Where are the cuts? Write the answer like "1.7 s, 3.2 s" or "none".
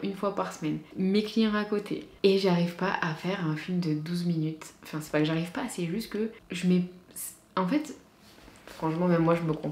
0.9 s, 6.4 s